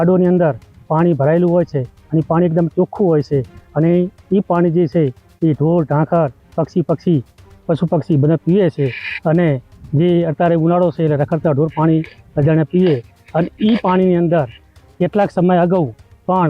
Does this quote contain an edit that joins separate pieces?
no; 0 cuts

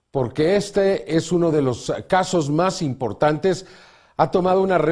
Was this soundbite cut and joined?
yes; 1 cut; at 2.5 s

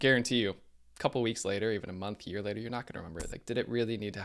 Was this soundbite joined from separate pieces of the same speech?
no; 0 cuts

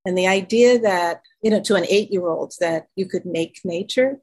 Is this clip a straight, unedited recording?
no; 1 cut; at 1.2 s

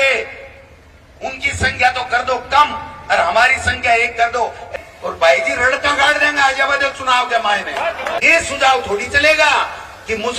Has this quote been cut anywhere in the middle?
yes; 2 cuts; at 4.7 s, 8.2 s

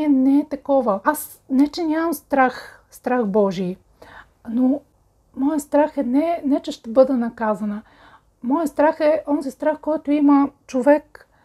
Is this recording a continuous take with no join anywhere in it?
no; 2 cuts; at 1.0 s, 4.9 s

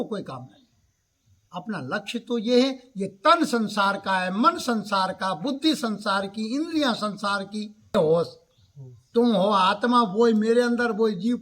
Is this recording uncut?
no; 1 cut; at 7.9 s

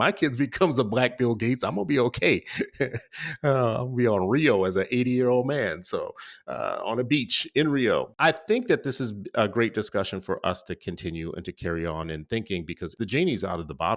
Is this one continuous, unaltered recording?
no; 2 cuts; at 8.1 s, 12.9 s

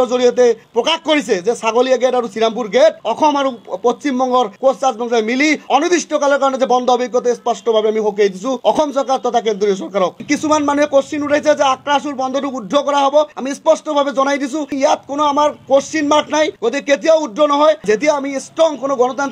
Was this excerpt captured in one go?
no; 5 cuts; at 10.2 s, 13.3 s, 14.7 s, 16.6 s, 17.8 s

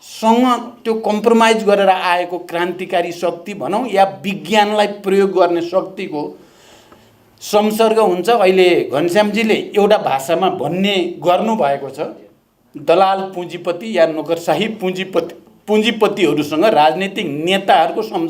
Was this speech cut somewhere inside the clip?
no; 0 cuts

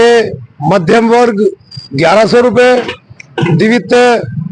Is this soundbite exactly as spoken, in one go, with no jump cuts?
yes; 0 cuts

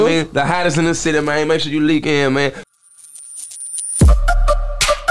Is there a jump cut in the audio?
yes; 1 cut; at 2.6 s

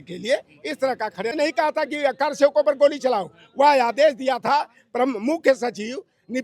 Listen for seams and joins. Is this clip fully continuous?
no; 1 cut; at 1.3 s

